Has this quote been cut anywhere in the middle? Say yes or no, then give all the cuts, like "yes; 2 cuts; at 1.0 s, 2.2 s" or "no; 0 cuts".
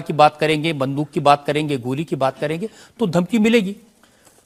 no; 0 cuts